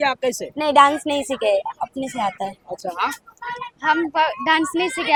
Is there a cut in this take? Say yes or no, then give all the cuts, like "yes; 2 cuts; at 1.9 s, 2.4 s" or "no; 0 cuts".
no; 0 cuts